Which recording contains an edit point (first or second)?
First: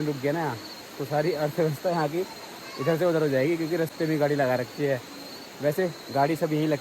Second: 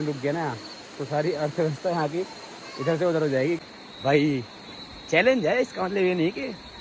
second